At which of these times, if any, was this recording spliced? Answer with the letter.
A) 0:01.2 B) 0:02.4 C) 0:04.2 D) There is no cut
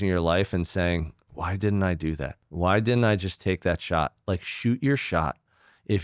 B